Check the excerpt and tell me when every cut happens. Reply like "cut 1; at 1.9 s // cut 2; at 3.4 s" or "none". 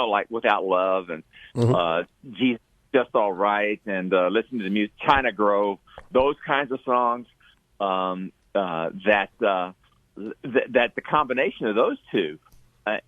none